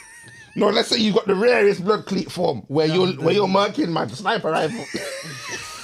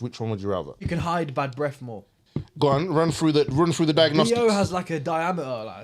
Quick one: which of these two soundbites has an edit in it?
second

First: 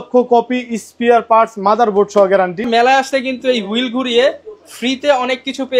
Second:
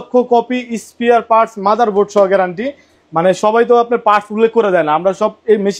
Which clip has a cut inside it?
first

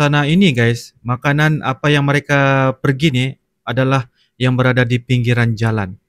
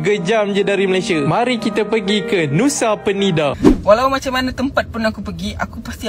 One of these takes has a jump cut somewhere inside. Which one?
second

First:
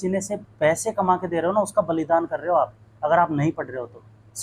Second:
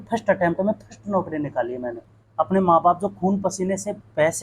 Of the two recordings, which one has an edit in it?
second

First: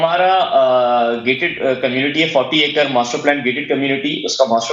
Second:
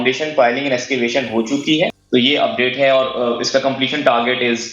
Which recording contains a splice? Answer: second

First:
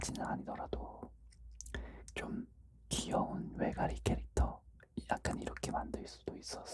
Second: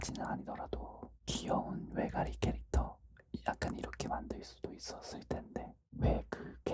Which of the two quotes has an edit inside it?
second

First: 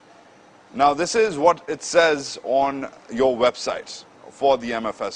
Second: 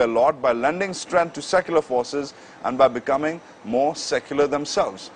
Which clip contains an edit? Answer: second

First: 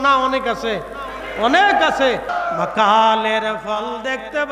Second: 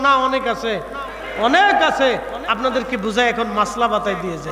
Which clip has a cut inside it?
first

